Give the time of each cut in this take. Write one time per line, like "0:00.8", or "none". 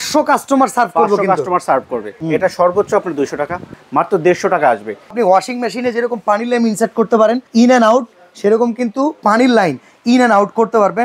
0:02.1
0:03.8
0:05.1
0:07.4